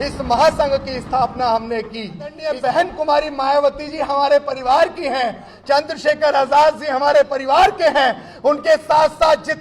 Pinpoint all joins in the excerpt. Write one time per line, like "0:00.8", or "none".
0:02.5